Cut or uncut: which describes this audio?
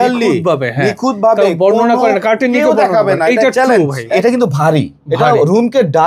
cut